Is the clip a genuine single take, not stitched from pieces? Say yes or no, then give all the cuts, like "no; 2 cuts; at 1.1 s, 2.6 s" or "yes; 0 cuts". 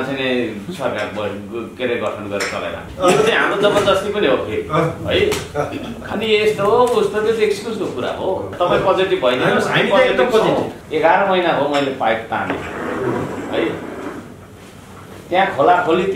no; 4 cuts; at 2.8 s, 6.0 s, 8.5 s, 10.8 s